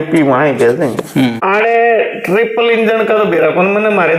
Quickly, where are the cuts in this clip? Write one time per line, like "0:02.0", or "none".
0:01.4